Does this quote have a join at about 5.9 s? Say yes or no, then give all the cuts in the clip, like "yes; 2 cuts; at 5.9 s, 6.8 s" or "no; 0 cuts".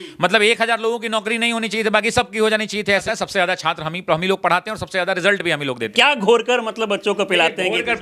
yes; 2 cuts; at 3.0 s, 5.9 s